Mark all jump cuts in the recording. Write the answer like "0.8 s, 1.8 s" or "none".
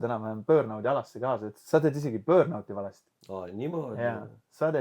none